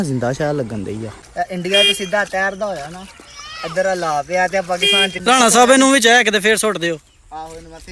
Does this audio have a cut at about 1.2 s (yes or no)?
yes